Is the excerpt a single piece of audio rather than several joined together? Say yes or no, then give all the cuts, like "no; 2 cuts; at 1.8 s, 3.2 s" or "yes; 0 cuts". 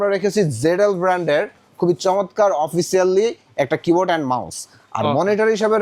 yes; 0 cuts